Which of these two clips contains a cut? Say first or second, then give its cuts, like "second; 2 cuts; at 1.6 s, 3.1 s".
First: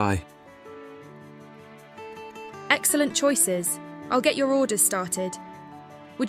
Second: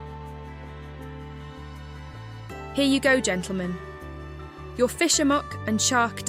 second; 1 cut; at 2.5 s